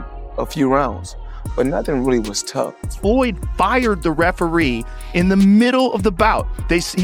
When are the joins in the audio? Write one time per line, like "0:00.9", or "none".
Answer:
0:02.8